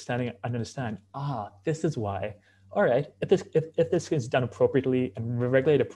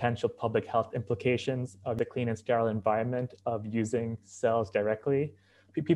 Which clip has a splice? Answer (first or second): second